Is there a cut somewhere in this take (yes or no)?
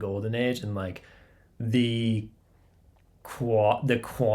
no